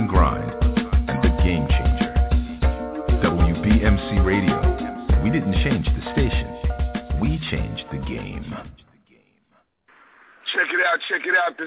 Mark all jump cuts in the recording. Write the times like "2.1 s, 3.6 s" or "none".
9.8 s